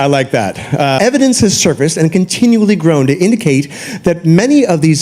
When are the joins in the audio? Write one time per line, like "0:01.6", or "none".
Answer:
0:01.0

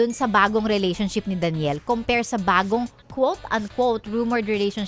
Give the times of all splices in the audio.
none

